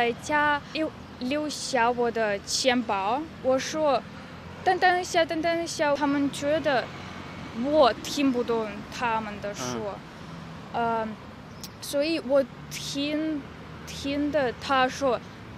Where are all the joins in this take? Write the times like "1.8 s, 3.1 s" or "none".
0.8 s, 3.3 s